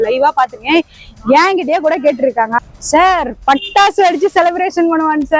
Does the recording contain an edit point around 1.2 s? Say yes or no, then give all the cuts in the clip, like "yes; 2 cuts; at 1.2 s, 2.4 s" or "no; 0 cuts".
no; 1 cut; at 2.5 s